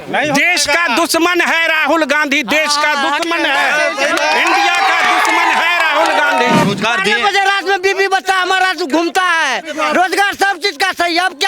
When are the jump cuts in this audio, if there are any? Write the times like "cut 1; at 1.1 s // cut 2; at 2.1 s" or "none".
cut 1; at 6.6 s